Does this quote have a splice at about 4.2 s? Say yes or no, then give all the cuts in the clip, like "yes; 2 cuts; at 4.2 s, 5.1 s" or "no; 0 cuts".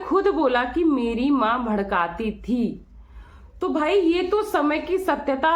no; 0 cuts